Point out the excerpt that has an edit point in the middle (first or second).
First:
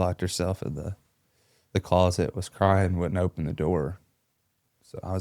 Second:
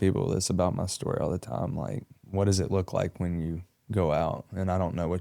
second